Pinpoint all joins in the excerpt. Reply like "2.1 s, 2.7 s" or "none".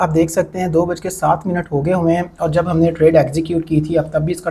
none